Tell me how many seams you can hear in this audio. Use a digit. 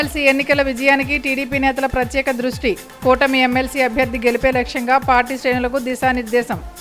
0